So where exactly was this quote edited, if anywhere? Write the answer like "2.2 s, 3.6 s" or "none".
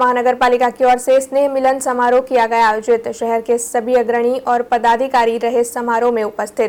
none